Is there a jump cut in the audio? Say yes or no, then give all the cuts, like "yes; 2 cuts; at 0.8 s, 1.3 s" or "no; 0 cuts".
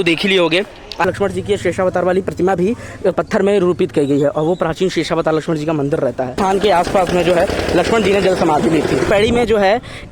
yes; 3 cuts; at 1.1 s, 6.3 s, 9.1 s